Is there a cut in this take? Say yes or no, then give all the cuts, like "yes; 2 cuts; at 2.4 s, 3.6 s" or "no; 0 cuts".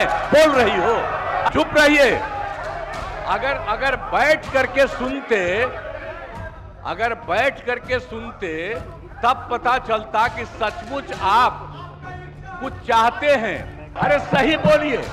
yes; 2 cuts; at 1.5 s, 13.8 s